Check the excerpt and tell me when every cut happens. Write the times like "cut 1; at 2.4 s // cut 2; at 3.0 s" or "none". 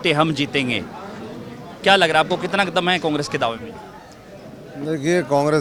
none

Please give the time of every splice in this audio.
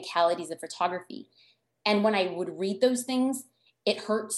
none

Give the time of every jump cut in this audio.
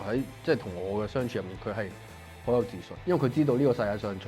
cut 1; at 2.9 s

